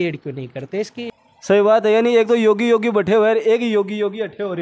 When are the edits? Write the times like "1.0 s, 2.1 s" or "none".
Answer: 1.0 s